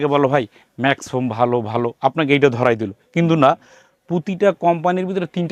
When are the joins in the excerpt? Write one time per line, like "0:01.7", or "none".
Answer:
none